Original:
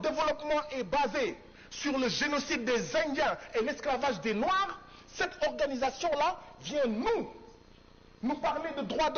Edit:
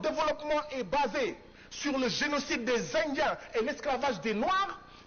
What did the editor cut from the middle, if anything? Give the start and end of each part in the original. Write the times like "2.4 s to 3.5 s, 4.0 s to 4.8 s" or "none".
none